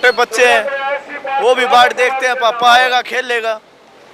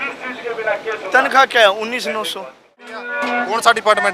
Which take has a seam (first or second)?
second